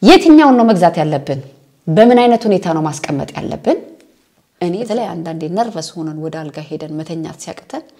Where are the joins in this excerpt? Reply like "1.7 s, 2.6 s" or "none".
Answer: 4.7 s

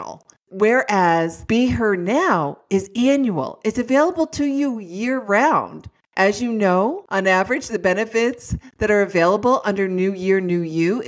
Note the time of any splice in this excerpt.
1.4 s, 7.0 s

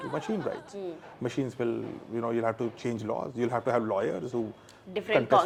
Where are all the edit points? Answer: none

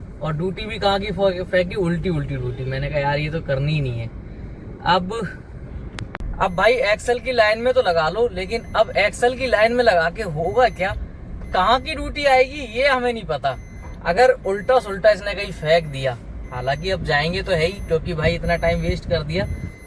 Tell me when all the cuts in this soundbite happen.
none

